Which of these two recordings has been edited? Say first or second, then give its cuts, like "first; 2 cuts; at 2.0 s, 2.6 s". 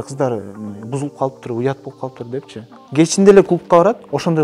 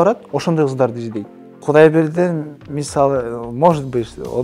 second; 1 cut; at 1.6 s